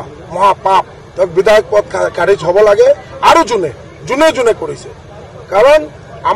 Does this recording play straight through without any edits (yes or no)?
no